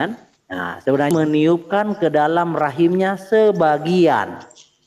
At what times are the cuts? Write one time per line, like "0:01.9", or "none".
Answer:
0:01.1